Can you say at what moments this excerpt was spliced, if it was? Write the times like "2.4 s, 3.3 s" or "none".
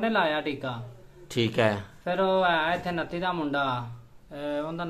none